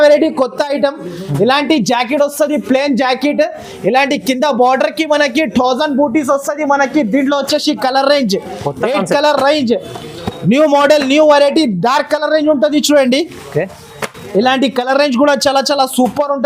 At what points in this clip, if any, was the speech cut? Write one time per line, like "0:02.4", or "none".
none